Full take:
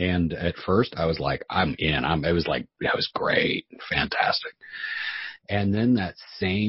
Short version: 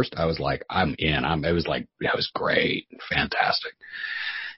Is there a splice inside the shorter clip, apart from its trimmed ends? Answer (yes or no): no